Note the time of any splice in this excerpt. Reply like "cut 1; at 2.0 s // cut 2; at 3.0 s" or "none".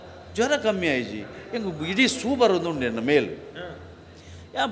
none